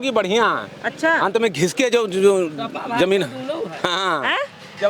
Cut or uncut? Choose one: uncut